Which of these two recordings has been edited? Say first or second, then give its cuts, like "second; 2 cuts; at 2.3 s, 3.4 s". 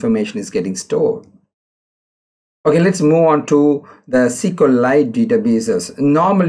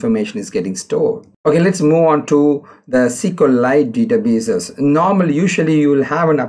second; 1 cut; at 1.3 s